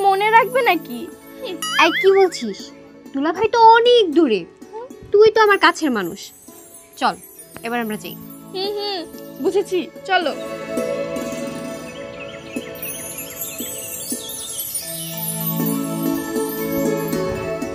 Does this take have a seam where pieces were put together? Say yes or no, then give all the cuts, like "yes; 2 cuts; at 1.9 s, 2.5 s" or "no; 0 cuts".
no; 0 cuts